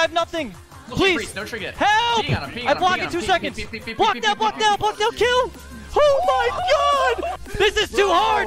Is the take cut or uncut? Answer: cut